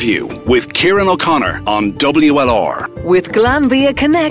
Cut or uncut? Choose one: uncut